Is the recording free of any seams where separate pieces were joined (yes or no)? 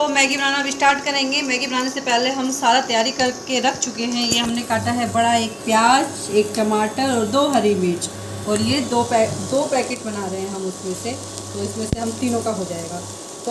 yes